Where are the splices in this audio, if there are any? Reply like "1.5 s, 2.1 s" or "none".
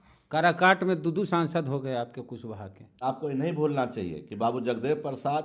3.0 s